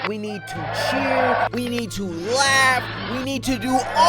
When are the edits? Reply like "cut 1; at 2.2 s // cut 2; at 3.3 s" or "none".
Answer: cut 1; at 1.5 s